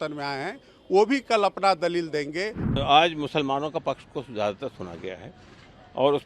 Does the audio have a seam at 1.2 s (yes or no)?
no